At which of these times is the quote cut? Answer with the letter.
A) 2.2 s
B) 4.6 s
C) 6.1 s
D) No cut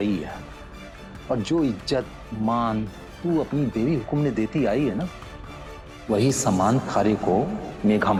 D